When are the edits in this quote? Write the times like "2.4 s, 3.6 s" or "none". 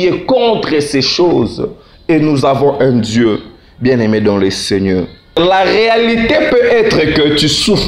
5.4 s